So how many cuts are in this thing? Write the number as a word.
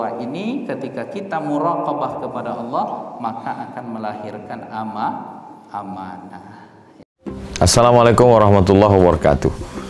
one